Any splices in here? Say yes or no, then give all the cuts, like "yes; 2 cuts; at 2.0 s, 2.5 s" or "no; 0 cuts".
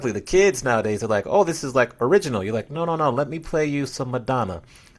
no; 0 cuts